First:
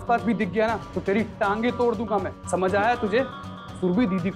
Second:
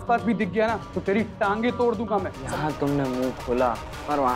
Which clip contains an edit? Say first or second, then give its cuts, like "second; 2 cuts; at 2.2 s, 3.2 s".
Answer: second; 1 cut; at 2.4 s